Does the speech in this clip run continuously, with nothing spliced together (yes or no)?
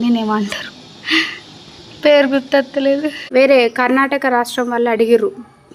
no